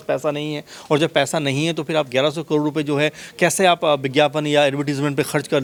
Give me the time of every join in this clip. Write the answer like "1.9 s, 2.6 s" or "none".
none